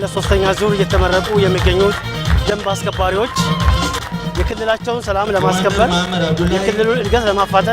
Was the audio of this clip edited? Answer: yes; 1 cut; at 4.0 s

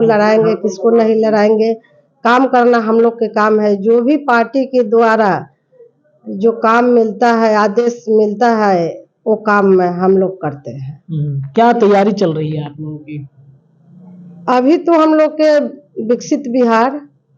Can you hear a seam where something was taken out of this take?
no; 0 cuts

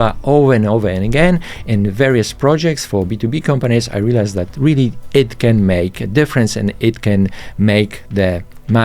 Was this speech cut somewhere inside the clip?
no; 0 cuts

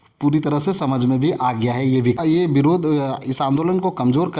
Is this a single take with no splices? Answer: no; 1 cut; at 2.2 s

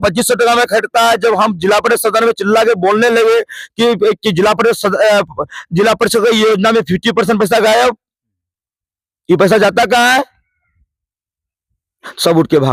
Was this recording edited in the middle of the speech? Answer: no; 0 cuts

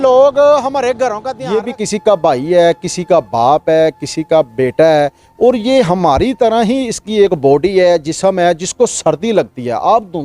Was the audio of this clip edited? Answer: yes; 1 cut; at 1.3 s

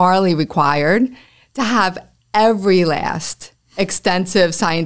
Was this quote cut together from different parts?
no; 0 cuts

